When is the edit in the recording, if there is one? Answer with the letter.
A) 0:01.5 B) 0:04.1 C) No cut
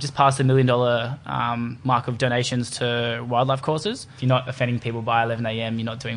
B